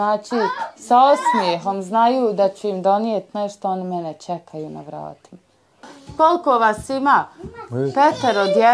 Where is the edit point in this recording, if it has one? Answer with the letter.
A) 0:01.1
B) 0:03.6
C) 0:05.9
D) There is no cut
C